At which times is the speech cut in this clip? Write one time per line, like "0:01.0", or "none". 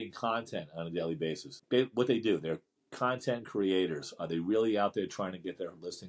0:01.5